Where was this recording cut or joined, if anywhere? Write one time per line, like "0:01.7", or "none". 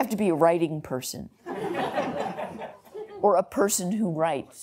none